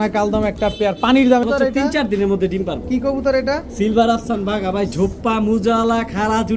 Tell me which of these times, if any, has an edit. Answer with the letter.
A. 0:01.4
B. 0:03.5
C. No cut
A